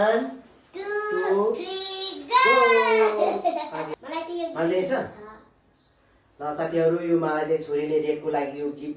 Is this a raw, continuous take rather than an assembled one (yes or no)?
no